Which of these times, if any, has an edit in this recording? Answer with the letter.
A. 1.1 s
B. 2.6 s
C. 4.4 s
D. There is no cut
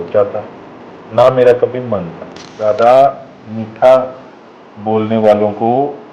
B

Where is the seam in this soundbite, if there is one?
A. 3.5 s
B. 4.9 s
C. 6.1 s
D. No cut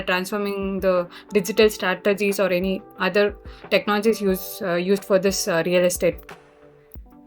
C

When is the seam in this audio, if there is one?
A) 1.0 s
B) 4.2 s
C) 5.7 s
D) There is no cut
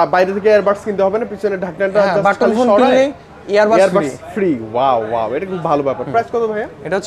D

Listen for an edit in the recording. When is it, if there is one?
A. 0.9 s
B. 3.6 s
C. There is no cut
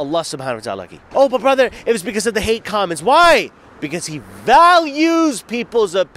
A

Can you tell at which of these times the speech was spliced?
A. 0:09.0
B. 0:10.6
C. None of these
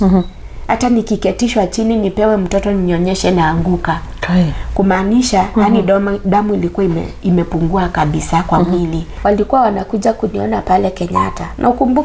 A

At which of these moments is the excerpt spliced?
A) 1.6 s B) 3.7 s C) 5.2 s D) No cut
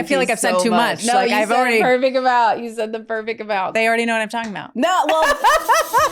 B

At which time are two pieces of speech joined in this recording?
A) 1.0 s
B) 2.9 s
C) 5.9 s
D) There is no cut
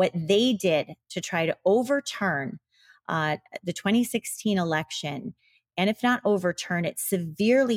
D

